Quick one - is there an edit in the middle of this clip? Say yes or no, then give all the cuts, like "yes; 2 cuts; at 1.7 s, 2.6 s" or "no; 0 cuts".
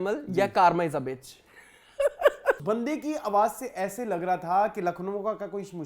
yes; 1 cut; at 2.6 s